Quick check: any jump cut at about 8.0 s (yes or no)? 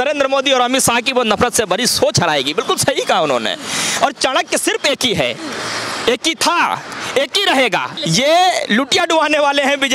yes